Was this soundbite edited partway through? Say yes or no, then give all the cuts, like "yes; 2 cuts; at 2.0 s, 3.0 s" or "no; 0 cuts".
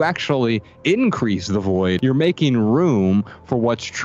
yes; 1 cut; at 2.0 s